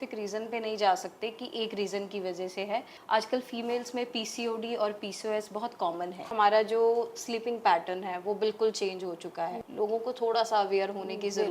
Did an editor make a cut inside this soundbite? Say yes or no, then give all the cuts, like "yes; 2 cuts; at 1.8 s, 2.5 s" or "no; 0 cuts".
yes; 3 cuts; at 2.9 s, 6.3 s, 9.6 s